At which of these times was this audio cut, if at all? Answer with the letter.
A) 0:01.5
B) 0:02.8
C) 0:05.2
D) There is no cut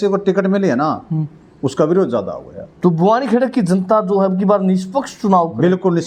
D